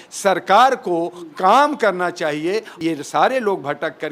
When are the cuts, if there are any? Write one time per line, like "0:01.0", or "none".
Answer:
0:02.7